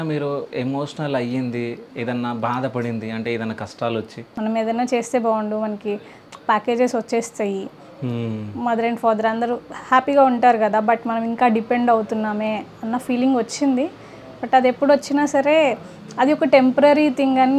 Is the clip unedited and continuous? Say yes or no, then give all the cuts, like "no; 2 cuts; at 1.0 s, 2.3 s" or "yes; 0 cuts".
no; 1 cut; at 4.2 s